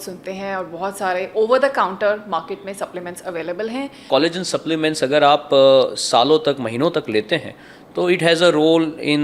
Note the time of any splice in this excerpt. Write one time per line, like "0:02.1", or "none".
0:04.0